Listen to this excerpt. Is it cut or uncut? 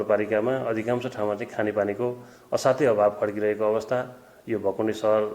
uncut